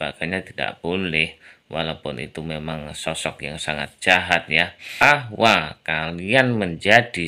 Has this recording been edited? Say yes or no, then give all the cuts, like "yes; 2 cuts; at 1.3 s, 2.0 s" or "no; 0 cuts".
yes; 1 cut; at 5.0 s